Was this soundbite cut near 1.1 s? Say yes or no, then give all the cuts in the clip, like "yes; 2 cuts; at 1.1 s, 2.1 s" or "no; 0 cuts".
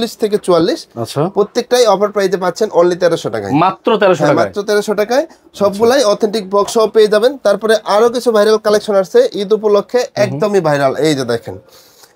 no; 0 cuts